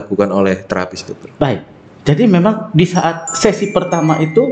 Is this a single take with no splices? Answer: yes; 0 cuts

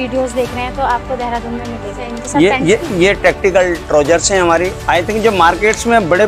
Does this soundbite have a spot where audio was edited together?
yes; 2 cuts; at 2.1 s, 4.8 s

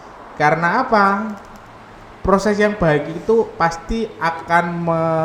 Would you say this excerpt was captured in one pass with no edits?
yes; 0 cuts

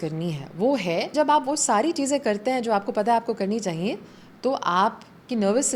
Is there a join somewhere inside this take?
yes; 1 cut; at 1.1 s

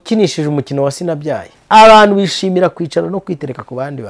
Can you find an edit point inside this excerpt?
yes; 1 cut; at 1.5 s

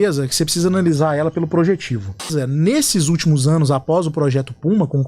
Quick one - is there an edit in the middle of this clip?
yes; 1 cut; at 2.3 s

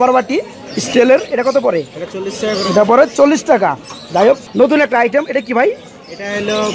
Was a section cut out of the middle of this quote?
no; 0 cuts

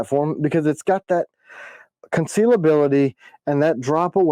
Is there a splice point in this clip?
no; 0 cuts

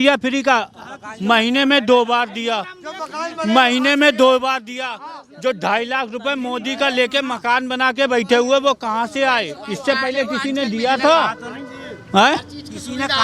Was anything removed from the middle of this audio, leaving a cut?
no; 0 cuts

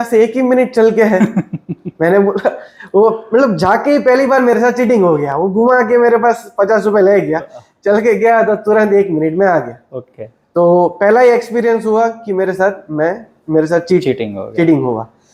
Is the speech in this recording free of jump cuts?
yes; 0 cuts

